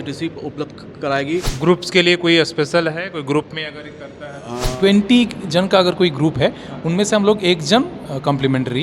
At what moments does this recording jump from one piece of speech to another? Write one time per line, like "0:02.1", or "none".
0:01.5
0:04.7